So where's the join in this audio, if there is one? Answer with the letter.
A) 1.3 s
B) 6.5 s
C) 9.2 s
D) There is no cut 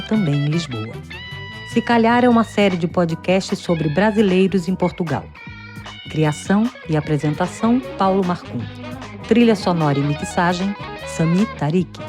D